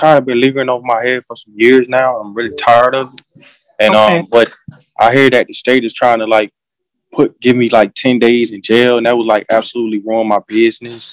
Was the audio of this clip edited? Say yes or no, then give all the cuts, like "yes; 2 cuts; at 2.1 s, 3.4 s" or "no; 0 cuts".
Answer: no; 0 cuts